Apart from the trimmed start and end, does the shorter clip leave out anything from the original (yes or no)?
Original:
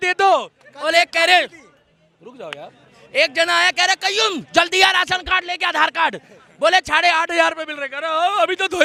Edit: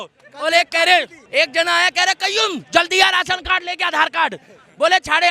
yes